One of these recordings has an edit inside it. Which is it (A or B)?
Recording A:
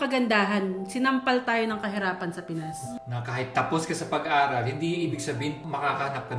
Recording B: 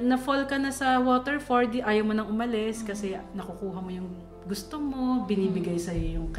A